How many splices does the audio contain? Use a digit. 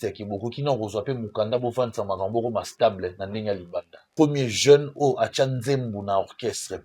1